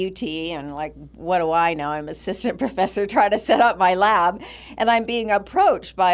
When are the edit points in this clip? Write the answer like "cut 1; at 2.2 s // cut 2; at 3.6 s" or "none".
none

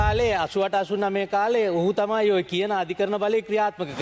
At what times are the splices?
none

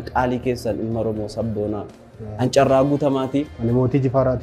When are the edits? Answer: cut 1; at 3.5 s

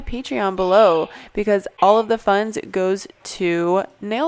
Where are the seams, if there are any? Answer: cut 1; at 1.7 s

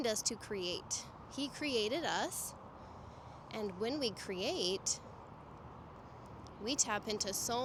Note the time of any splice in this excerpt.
none

